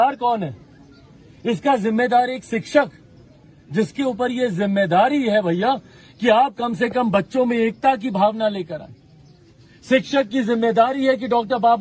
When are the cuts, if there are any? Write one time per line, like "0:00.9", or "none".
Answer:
none